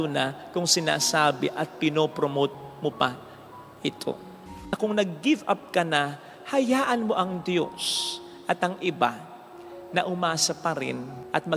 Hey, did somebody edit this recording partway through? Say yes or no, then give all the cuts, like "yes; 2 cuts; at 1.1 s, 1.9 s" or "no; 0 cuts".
yes; 1 cut; at 4.5 s